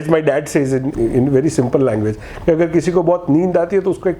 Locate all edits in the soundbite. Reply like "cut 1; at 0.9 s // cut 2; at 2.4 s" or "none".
cut 1; at 0.9 s